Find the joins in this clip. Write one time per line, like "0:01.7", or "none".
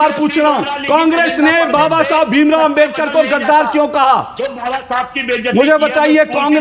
none